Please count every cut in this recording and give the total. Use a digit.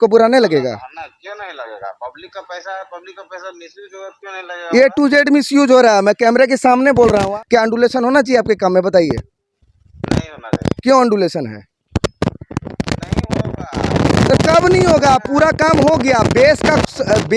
1